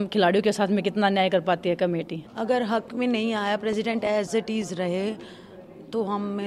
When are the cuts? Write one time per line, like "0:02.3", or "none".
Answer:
0:02.1